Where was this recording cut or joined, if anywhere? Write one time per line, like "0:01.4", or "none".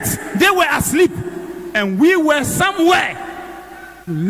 none